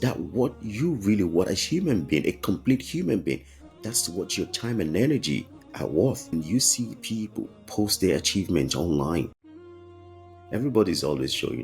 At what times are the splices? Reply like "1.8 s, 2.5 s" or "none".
6.3 s